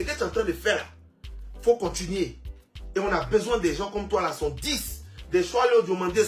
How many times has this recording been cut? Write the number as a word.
zero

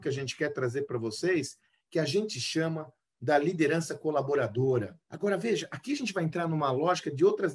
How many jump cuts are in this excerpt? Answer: one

